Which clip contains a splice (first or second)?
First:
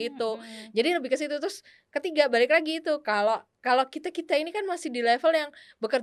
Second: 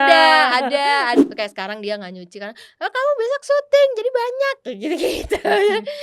second